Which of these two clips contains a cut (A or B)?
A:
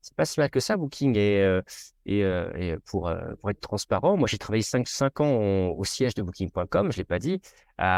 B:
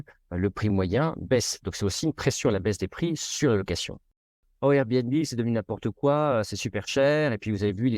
B